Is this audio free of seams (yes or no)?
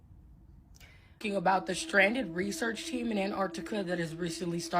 no